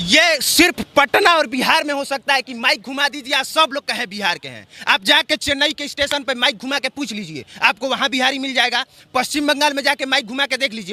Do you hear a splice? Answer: no; 0 cuts

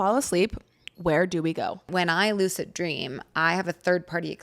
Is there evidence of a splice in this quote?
yes; 1 cut; at 1.9 s

